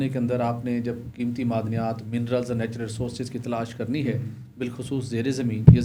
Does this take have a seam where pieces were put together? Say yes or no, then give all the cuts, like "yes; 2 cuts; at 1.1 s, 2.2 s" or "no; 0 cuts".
no; 0 cuts